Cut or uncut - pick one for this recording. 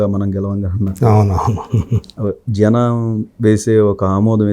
uncut